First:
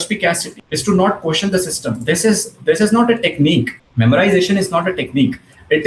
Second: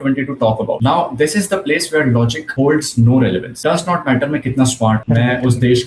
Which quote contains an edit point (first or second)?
second